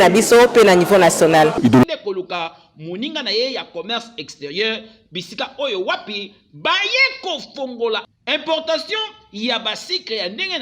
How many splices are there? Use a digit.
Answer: 1